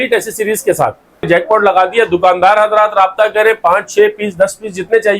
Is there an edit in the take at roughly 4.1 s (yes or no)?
no